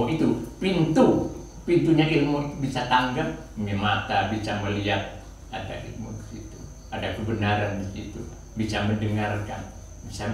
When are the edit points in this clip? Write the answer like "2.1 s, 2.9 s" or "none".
none

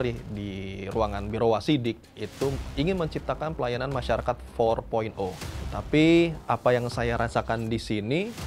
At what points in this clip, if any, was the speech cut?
5.7 s

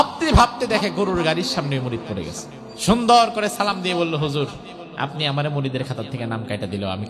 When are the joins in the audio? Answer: 2.4 s

